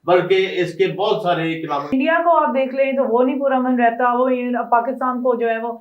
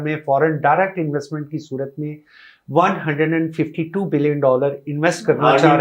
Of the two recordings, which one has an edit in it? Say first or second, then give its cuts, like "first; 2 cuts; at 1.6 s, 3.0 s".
first; 1 cut; at 1.9 s